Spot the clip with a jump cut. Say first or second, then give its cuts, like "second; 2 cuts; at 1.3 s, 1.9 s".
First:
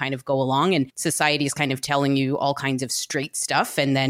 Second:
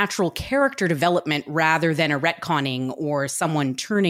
first; 1 cut; at 0.9 s